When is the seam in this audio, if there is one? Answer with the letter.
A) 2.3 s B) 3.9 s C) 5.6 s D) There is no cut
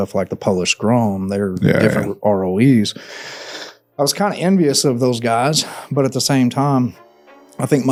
D